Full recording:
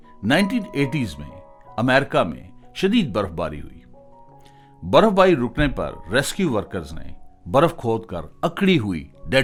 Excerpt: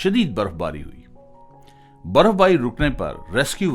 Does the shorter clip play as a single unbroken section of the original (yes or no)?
yes